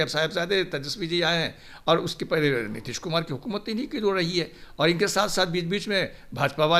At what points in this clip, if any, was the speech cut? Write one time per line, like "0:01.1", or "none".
none